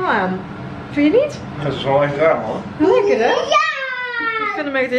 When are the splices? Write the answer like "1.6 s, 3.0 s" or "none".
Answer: none